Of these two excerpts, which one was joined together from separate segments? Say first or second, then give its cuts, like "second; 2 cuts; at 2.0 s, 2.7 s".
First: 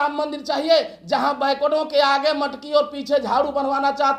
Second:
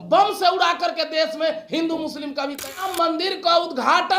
second; 1 cut; at 2.7 s